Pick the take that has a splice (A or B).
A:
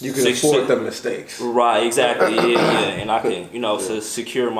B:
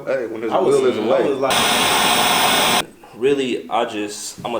B